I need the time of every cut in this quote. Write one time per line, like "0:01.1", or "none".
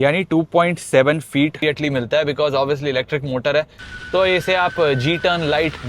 0:01.6
0:03.8